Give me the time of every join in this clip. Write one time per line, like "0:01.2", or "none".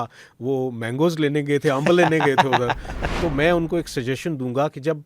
0:02.9

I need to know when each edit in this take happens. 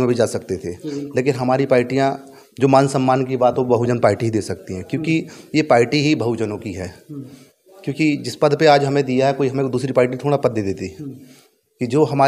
none

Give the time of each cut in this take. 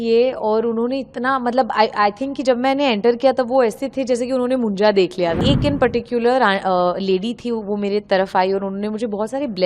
0:05.4

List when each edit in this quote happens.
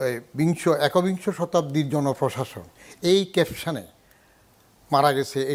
none

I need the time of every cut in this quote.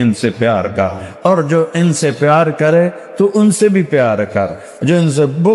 none

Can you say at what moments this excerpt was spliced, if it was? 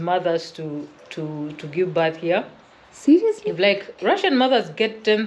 none

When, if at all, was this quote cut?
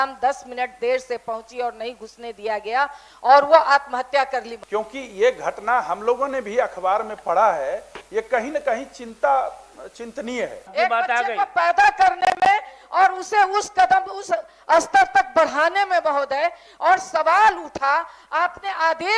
0:04.6
0:10.6

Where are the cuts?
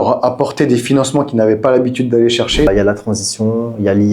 0:02.7

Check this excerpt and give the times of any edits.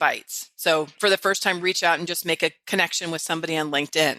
0:01.0

